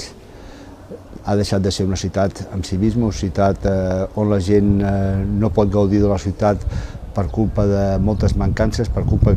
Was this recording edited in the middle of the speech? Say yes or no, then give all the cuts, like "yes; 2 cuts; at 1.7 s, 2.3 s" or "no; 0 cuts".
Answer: no; 0 cuts